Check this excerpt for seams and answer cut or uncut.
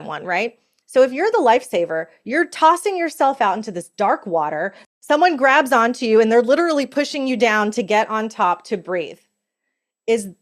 cut